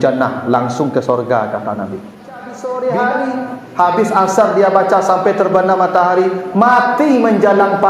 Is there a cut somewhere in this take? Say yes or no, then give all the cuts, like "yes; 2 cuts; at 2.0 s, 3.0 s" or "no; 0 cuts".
yes; 1 cut; at 2.6 s